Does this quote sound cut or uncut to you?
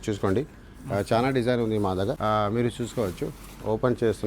cut